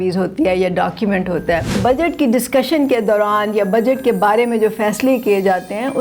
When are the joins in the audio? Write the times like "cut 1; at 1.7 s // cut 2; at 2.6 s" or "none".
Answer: cut 1; at 1.7 s